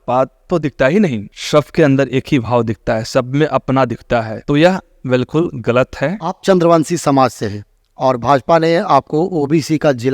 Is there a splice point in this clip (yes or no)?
no